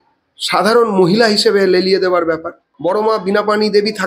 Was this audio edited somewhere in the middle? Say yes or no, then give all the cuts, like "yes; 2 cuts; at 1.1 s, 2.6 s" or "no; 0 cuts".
yes; 1 cut; at 2.7 s